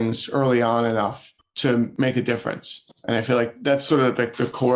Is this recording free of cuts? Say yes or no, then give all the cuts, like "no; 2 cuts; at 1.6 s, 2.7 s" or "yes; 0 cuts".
yes; 0 cuts